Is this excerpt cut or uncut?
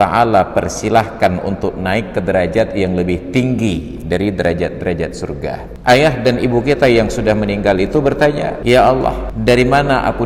cut